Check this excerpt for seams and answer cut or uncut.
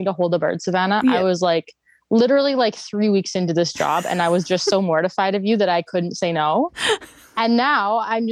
cut